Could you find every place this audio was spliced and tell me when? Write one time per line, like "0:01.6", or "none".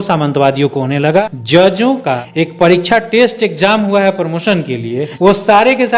0:01.2
0:02.2
0:05.1

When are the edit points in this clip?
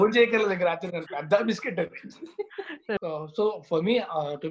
0:03.0

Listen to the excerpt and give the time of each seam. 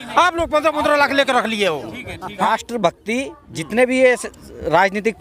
0:02.4

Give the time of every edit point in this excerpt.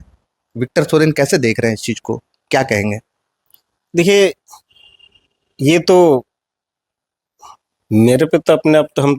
none

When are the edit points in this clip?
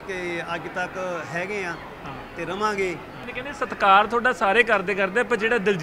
0:03.2

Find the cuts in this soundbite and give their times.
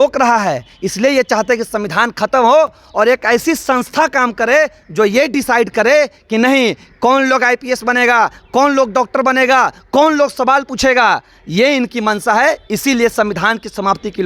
none

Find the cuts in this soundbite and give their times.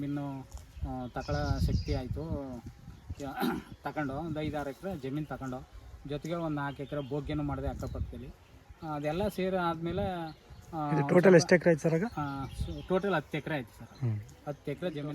none

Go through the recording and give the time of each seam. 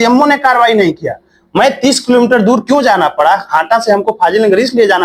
none

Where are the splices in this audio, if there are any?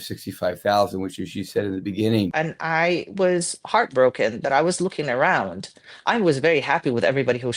0:02.3

